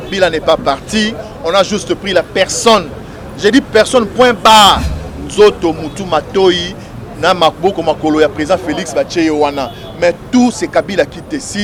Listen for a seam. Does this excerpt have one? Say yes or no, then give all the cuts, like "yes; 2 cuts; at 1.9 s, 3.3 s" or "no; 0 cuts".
no; 0 cuts